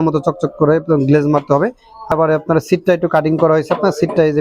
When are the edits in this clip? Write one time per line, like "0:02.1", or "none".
0:02.1